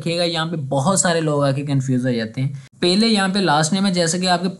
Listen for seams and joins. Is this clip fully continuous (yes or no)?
no